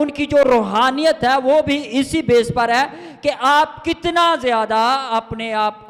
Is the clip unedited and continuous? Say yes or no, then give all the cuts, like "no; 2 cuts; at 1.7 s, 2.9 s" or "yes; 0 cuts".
yes; 0 cuts